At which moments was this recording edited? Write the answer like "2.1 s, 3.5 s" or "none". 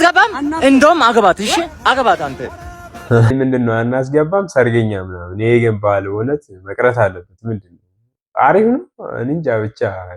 3.3 s